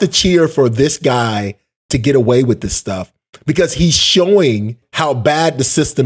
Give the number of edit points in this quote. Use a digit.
1